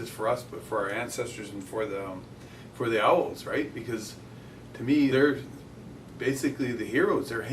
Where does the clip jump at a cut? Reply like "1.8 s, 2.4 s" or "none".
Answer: 5.1 s